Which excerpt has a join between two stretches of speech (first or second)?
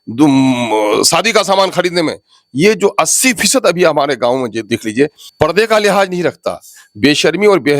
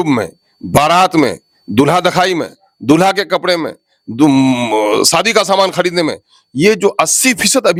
first